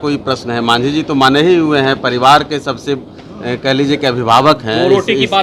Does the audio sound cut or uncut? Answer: uncut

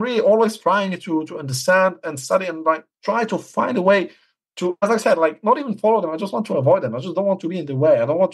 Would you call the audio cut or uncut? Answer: uncut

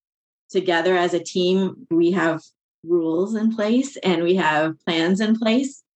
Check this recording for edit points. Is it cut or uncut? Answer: cut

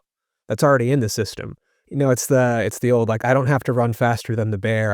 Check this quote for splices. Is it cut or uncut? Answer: cut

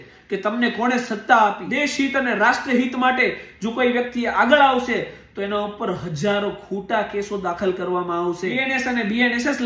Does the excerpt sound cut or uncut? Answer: cut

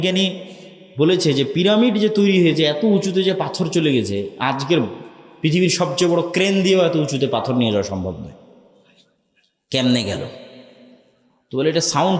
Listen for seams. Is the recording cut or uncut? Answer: uncut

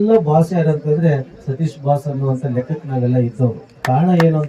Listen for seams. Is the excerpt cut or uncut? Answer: uncut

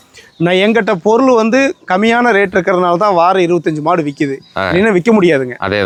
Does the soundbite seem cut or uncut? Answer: uncut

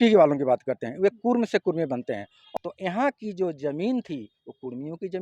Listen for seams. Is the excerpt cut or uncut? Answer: cut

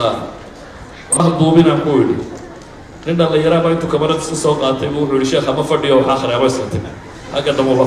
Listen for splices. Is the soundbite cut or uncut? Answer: cut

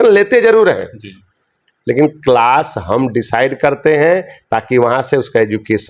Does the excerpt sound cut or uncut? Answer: uncut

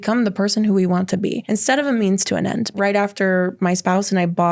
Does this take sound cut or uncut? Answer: cut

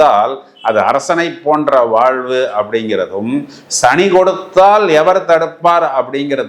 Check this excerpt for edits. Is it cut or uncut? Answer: uncut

